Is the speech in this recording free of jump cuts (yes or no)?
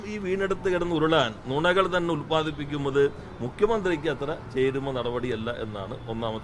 yes